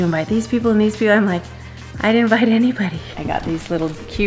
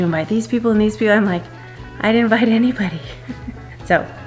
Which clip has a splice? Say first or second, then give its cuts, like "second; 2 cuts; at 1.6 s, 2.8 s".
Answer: first; 1 cut; at 3.1 s